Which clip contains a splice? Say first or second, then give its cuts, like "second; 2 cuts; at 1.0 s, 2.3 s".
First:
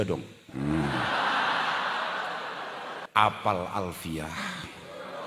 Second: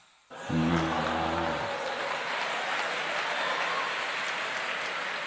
first; 1 cut; at 3.0 s